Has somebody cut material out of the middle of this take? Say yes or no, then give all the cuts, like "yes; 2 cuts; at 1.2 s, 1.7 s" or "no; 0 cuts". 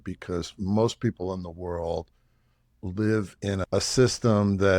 yes; 2 cuts; at 2.8 s, 3.7 s